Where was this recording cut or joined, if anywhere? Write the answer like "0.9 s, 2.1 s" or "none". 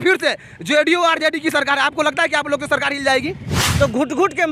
3.6 s